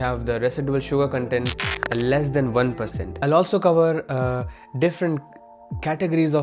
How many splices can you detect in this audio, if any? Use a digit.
1